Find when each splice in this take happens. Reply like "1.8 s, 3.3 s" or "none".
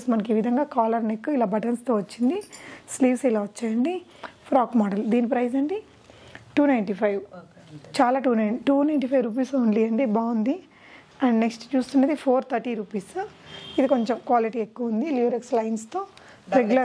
none